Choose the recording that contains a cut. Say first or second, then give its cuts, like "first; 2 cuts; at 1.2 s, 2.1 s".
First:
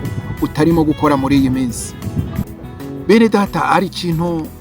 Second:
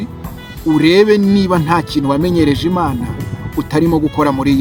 first; 1 cut; at 2.6 s